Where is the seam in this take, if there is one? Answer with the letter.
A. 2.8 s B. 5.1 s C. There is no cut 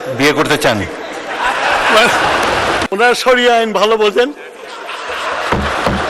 A